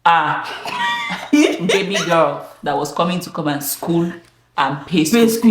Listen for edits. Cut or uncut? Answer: uncut